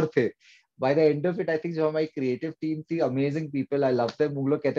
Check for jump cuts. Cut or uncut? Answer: uncut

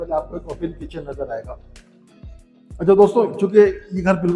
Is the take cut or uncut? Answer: uncut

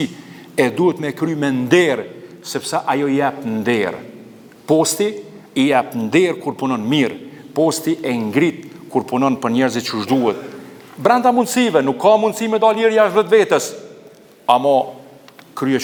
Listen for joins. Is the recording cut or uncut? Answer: uncut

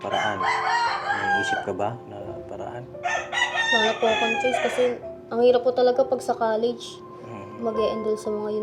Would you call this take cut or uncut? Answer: uncut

